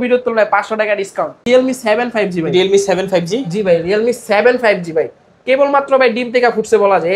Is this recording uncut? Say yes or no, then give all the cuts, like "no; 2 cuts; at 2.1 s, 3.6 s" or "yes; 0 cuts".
no; 1 cut; at 1.4 s